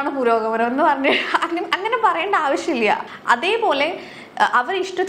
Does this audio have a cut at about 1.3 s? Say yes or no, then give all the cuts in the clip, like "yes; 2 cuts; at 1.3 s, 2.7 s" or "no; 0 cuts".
no; 1 cut; at 3.0 s